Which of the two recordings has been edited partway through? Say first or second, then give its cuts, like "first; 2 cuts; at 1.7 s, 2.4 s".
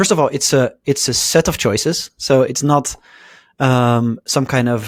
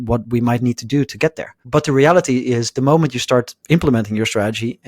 second; 1 cut; at 1.5 s